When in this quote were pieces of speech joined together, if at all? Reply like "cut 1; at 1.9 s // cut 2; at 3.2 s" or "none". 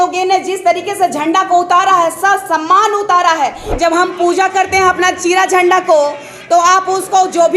cut 1; at 3.6 s